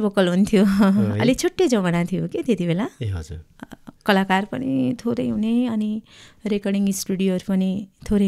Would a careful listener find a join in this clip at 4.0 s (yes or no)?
no